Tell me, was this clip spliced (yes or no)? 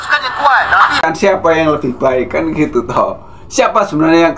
yes